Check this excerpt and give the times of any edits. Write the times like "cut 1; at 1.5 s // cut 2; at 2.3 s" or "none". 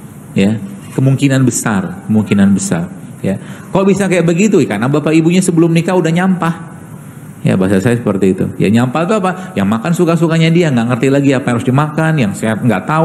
none